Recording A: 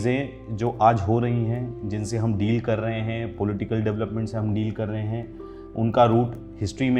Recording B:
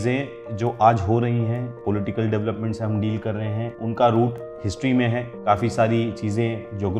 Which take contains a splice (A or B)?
B